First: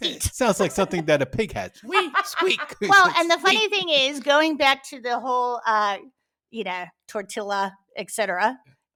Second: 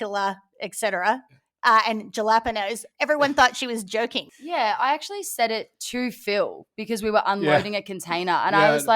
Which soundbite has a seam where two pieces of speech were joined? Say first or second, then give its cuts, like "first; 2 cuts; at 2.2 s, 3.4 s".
second; 1 cut; at 4.3 s